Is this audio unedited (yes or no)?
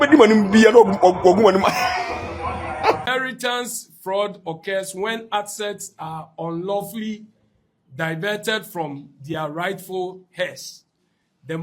no